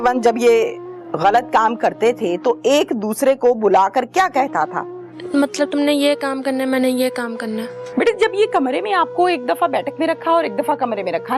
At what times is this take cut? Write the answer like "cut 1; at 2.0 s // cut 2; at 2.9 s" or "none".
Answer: cut 1; at 5.2 s // cut 2; at 7.8 s